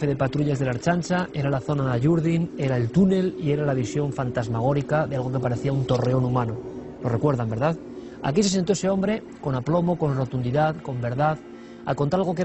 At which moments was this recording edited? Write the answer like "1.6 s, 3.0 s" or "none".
2.8 s